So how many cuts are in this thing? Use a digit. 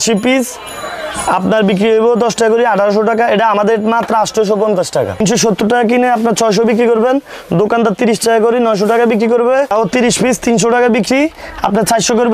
2